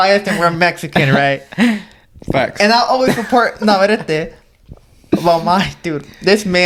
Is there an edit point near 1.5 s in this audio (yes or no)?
no